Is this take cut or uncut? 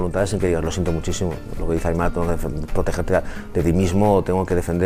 uncut